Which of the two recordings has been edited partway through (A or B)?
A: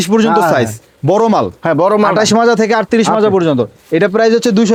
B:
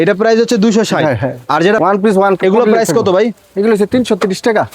B